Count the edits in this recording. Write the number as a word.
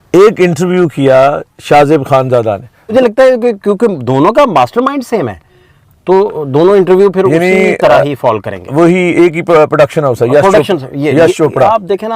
one